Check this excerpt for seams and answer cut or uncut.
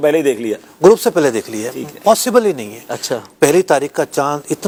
uncut